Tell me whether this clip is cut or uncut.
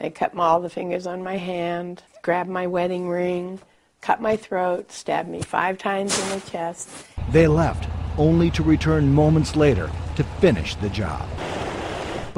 uncut